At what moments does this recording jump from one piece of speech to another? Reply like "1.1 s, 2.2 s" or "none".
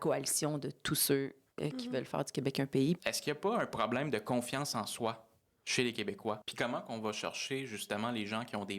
3.0 s, 6.5 s